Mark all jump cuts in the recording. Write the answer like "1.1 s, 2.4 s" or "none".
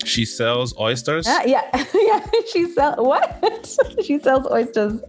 1.2 s